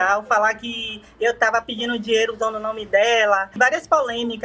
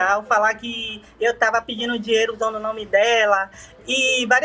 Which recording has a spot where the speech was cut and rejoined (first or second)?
first